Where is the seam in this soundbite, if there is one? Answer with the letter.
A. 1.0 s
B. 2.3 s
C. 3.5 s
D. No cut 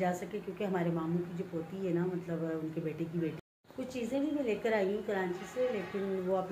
C